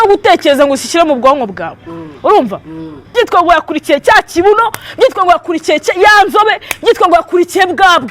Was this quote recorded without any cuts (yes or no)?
no